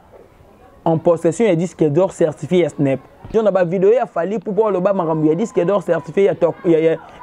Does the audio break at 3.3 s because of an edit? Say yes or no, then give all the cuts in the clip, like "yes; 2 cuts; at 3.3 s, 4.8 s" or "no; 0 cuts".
yes; 1 cut; at 3.3 s